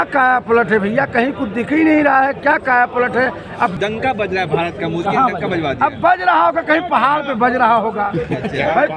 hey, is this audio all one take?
no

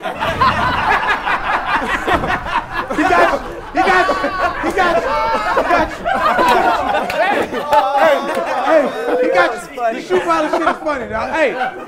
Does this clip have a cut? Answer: no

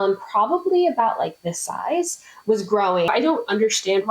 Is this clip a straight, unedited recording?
no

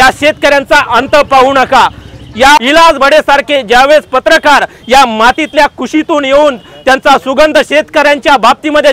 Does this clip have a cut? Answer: yes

